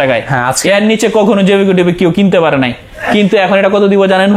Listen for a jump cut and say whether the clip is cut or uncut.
uncut